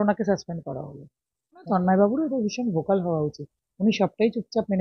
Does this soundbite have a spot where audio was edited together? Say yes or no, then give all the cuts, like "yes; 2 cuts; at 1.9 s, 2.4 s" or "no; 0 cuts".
yes; 1 cut; at 1.6 s